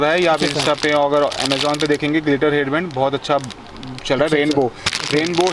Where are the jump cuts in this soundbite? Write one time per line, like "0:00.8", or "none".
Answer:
none